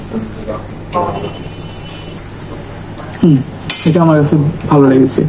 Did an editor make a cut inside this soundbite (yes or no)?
yes